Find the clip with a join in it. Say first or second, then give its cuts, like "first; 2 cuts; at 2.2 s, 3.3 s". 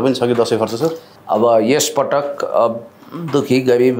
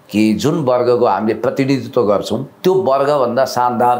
first; 1 cut; at 1.1 s